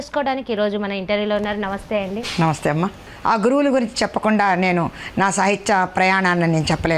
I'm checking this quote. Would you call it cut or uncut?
cut